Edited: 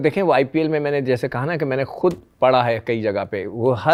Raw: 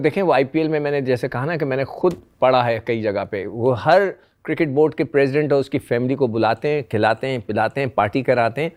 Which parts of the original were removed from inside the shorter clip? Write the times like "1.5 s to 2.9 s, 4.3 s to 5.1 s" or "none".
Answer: none